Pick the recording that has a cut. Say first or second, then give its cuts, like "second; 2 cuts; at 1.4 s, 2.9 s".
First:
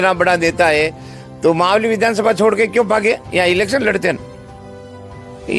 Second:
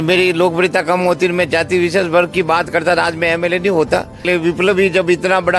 second; 1 cut; at 4.2 s